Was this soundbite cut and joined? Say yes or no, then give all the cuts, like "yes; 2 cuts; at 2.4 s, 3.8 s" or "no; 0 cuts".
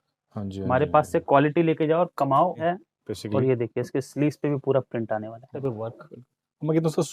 yes; 2 cuts; at 2.7 s, 5.5 s